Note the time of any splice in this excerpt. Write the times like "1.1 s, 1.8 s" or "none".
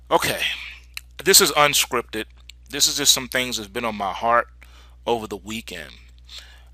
none